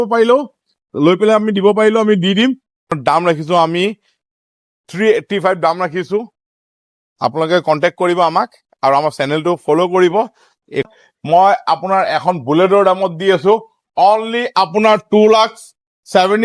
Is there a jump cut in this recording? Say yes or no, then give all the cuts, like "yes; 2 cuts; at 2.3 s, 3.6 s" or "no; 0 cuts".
yes; 2 cuts; at 2.9 s, 10.9 s